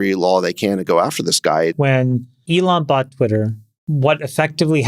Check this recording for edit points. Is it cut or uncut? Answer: cut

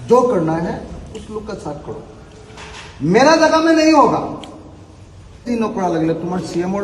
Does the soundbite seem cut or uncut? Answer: cut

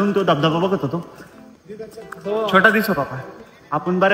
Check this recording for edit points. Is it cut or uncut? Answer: uncut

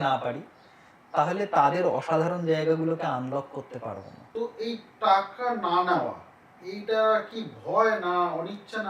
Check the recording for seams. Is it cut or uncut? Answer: cut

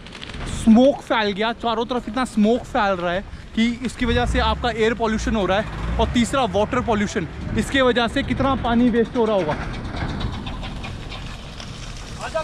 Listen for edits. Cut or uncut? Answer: uncut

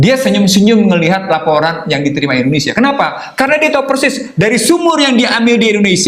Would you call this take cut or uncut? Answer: uncut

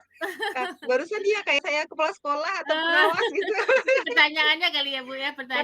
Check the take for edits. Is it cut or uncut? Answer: cut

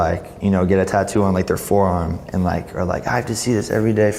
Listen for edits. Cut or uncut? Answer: uncut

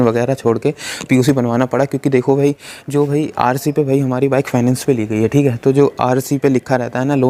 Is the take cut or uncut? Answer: uncut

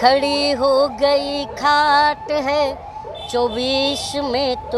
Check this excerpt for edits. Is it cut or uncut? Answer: uncut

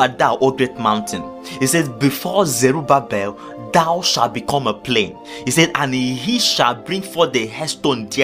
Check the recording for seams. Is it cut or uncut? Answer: uncut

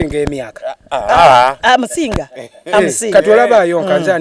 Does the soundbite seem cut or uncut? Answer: uncut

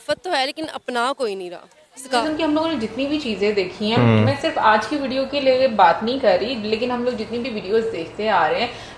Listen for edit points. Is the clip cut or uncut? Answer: cut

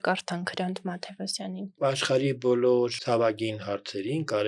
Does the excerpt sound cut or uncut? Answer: cut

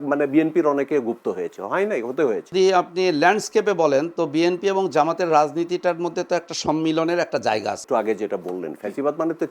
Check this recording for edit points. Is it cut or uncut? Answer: cut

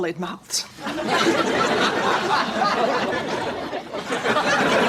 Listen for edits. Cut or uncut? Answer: uncut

